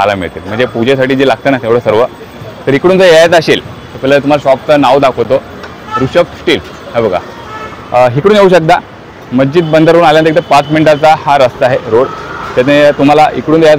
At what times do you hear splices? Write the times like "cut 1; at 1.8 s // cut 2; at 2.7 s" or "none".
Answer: none

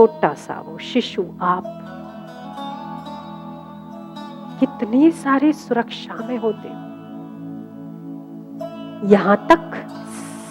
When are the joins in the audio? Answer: none

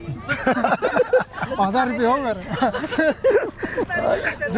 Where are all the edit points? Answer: none

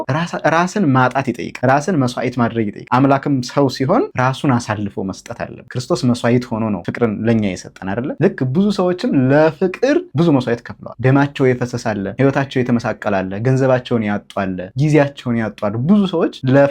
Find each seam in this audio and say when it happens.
cut 1; at 2.8 s // cut 2; at 6.9 s

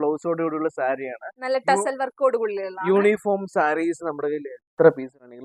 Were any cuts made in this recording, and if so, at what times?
none

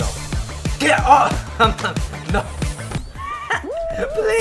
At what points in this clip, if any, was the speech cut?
cut 1; at 3.0 s

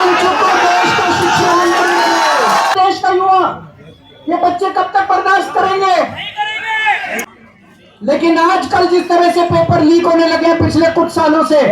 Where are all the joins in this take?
cut 1; at 2.8 s // cut 2; at 7.2 s

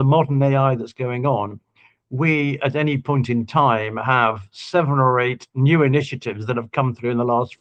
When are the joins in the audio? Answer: none

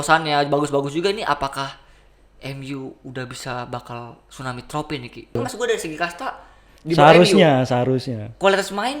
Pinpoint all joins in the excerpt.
cut 1; at 5.4 s

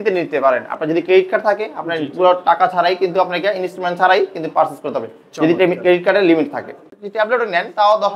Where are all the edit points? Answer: cut 1; at 6.8 s

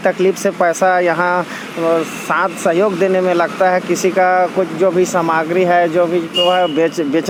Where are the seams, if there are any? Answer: none

